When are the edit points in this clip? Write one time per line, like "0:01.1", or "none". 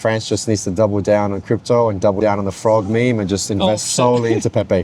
none

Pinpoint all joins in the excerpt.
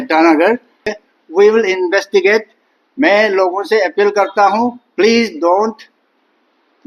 0:00.9

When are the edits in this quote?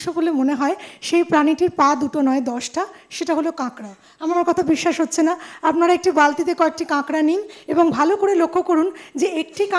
none

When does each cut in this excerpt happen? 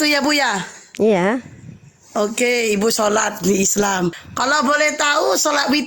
0:04.3

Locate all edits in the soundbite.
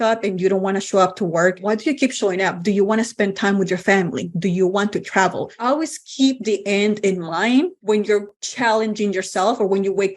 0:01.6
0:05.6
0:08.0

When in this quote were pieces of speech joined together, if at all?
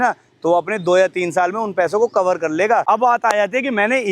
0:02.8

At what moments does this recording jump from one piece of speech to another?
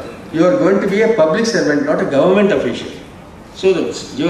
none

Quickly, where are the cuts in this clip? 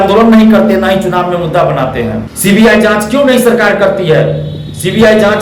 0:02.3

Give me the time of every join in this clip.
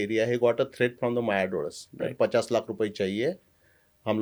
none

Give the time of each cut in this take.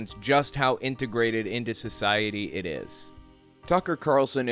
0:03.4

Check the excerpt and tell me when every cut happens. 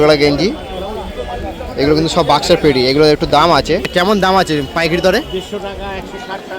0:03.9

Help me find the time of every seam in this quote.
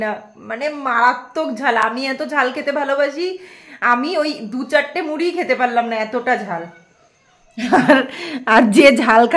none

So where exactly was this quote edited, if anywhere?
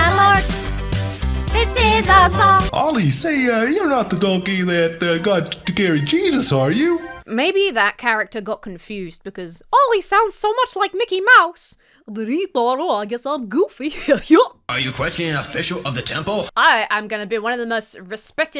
0:02.7
0:07.1
0:14.6
0:16.5

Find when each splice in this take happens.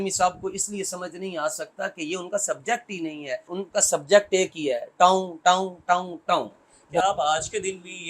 0:03.5
0:07.0

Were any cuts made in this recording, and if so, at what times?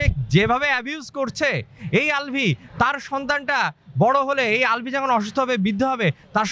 none

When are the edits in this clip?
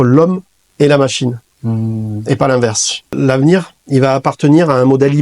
0:03.1

